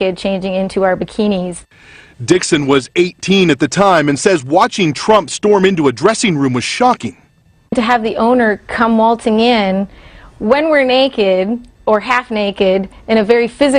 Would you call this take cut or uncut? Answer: uncut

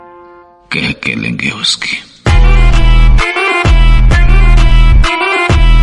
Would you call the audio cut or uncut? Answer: uncut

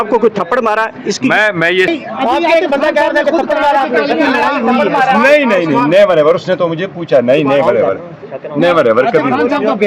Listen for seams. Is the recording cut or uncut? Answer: cut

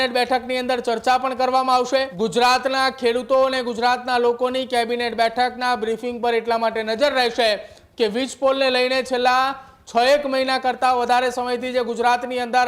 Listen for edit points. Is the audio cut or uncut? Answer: cut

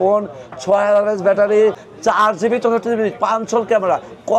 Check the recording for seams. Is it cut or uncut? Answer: cut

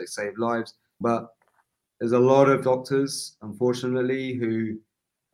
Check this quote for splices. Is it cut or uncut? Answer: cut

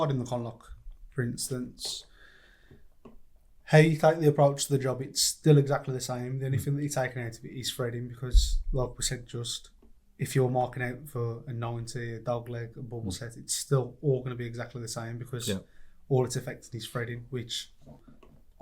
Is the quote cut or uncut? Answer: uncut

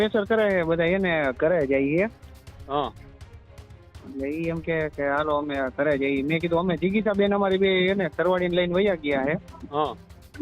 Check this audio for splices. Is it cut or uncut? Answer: uncut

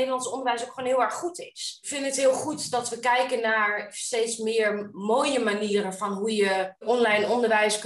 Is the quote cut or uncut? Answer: cut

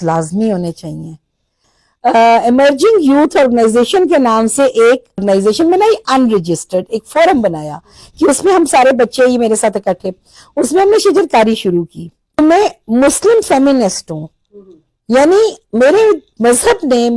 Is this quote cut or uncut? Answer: cut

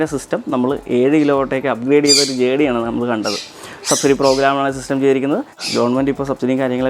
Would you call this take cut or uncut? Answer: cut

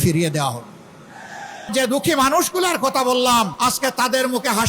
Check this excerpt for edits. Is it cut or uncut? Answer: cut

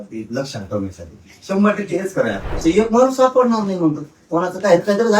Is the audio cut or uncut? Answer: cut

